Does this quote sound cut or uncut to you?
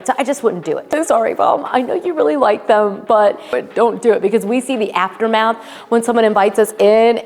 cut